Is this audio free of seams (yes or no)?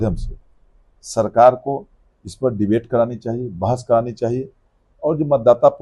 yes